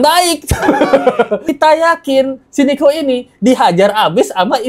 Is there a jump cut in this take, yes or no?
yes